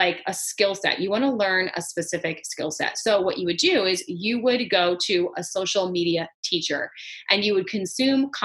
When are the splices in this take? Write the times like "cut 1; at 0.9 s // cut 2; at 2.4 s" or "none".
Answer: none